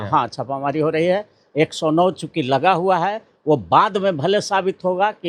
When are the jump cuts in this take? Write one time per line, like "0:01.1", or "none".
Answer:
none